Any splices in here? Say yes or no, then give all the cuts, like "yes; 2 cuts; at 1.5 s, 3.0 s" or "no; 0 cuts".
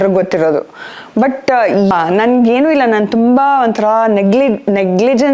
yes; 1 cut; at 1.9 s